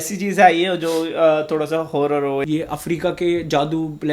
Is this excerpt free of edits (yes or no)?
no